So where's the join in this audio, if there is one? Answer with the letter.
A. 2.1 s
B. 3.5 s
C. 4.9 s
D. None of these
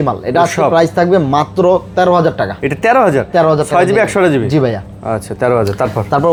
D